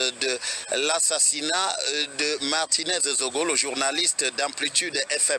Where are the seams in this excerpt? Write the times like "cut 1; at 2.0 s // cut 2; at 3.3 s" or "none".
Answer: cut 1; at 2.4 s // cut 2; at 4.4 s